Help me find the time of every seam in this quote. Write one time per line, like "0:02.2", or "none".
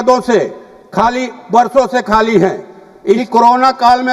0:03.2